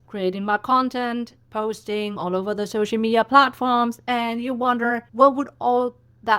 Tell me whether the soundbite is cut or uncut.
cut